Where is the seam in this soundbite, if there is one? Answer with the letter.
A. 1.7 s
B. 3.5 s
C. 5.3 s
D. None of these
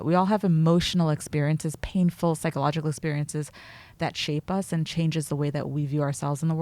D